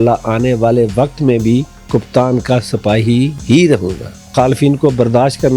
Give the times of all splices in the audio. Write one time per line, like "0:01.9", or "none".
0:01.8
0:03.4
0:04.2